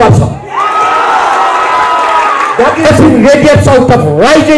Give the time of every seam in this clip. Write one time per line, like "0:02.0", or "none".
0:02.9